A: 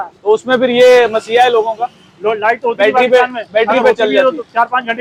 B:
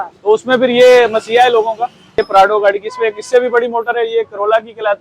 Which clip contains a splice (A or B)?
B